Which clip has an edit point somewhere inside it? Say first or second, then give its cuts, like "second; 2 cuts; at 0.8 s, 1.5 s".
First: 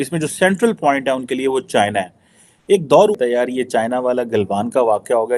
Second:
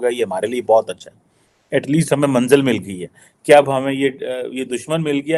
first; 1 cut; at 3.1 s